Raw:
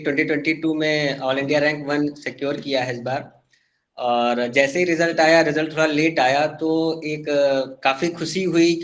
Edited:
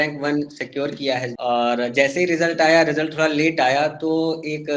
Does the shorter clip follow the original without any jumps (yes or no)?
no